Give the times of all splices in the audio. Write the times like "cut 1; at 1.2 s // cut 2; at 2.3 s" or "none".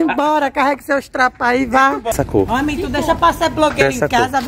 cut 1; at 2.1 s